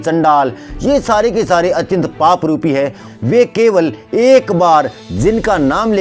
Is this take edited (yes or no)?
yes